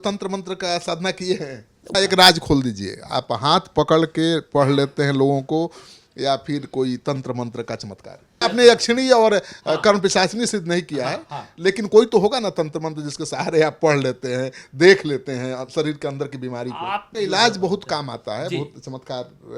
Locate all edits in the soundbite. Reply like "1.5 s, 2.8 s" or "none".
1.9 s, 8.3 s, 17.1 s